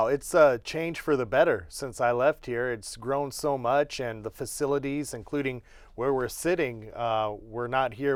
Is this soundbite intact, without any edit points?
yes; 0 cuts

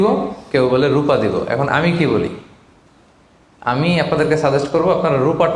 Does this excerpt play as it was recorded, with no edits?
yes; 0 cuts

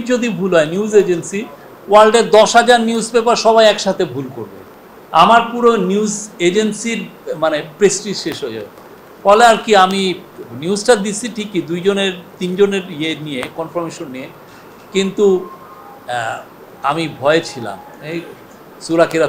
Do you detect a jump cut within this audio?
no; 0 cuts

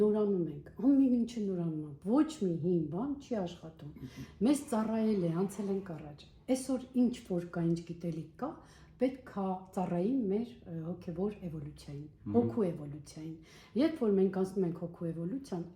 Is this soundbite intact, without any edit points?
yes; 0 cuts

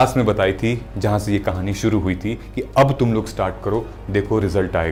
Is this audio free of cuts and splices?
yes; 0 cuts

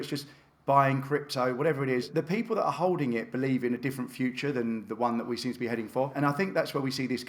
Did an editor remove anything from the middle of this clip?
yes; 2 cuts; at 2.1 s, 6.1 s

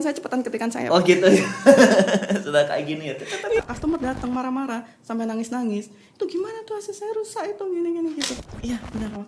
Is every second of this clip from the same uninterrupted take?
no; 2 cuts; at 3.6 s, 8.3 s

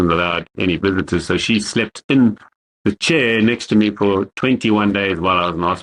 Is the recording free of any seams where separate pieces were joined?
yes; 0 cuts

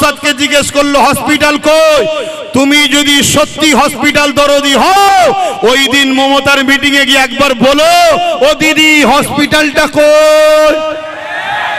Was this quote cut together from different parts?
no; 0 cuts

